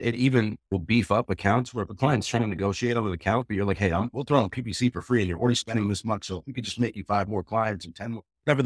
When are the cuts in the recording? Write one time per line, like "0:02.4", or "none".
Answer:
none